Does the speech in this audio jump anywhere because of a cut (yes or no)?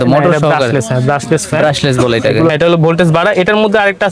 yes